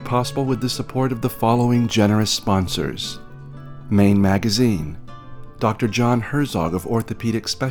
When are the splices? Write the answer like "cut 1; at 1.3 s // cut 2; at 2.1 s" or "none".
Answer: none